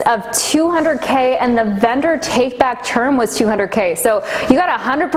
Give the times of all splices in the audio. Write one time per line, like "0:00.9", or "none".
none